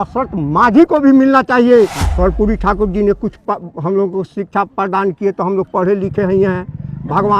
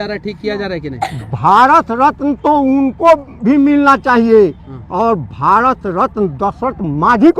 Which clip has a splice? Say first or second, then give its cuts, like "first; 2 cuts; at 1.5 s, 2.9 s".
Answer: first; 1 cut; at 2.0 s